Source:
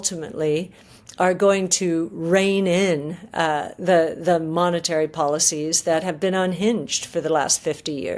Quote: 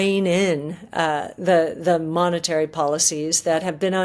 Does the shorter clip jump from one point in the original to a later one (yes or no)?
no